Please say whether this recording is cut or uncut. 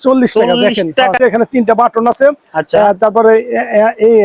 cut